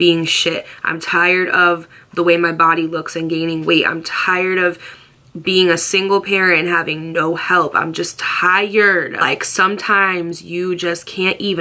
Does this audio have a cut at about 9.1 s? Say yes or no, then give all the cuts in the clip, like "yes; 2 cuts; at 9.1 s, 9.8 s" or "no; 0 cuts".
yes; 1 cut; at 9.1 s